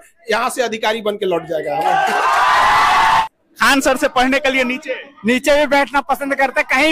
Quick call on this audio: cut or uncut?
cut